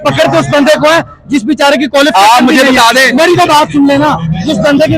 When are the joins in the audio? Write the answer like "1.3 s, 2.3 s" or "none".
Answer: none